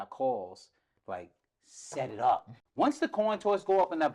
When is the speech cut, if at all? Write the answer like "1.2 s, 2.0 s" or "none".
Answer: 2.6 s